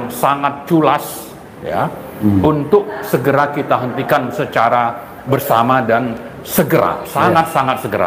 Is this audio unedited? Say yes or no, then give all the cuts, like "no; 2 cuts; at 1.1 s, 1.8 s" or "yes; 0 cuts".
yes; 0 cuts